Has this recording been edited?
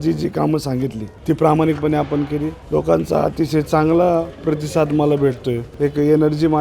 yes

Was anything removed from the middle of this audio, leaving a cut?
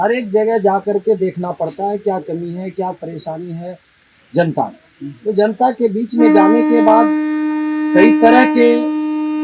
no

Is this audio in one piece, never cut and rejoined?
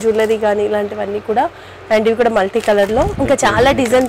no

